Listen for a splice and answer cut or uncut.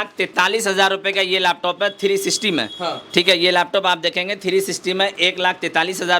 uncut